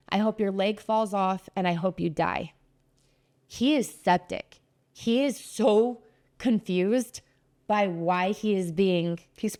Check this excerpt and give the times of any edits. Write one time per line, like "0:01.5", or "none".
none